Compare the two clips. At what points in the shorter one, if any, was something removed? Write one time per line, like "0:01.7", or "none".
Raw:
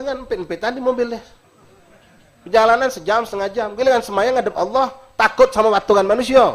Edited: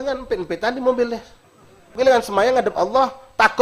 0:01.9